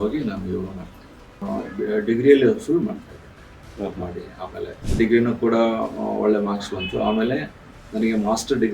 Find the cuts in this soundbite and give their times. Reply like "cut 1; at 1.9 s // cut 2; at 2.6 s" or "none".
cut 1; at 1.4 s // cut 2; at 4.8 s

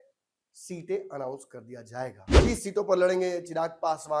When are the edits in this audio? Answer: cut 1; at 2.3 s

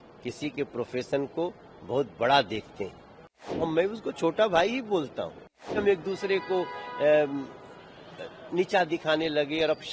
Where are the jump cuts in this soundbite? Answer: cut 1; at 3.7 s // cut 2; at 5.7 s

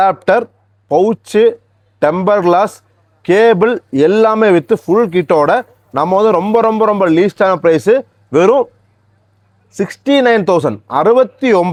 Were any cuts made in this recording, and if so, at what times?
none

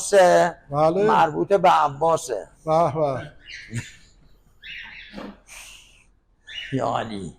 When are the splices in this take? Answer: none

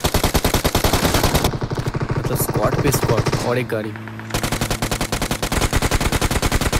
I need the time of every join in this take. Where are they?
cut 1; at 1.5 s

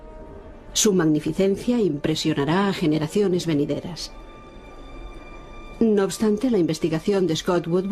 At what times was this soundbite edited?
cut 1; at 5.4 s

